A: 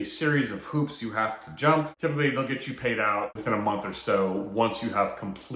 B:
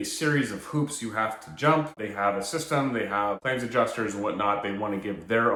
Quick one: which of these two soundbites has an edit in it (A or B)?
A